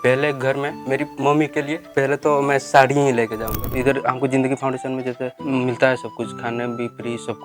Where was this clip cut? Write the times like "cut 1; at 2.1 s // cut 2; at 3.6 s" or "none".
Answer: cut 1; at 1.0 s // cut 2; at 1.8 s // cut 3; at 3.7 s